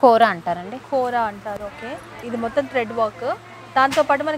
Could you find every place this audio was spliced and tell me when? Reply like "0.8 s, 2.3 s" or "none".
2.2 s